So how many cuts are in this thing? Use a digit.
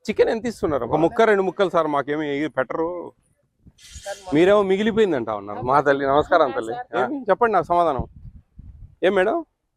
2